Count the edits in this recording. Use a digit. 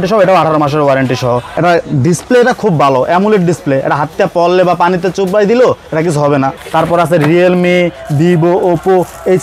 2